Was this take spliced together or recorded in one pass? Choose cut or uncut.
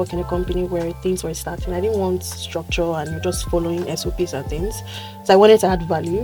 uncut